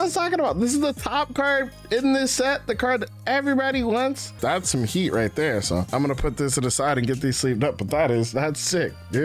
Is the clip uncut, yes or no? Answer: no